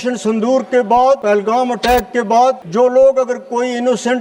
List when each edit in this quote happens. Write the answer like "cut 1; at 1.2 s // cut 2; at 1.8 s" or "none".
cut 1; at 1.2 s // cut 2; at 2.6 s